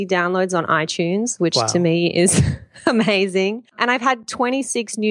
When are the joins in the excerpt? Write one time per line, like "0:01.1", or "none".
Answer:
0:03.7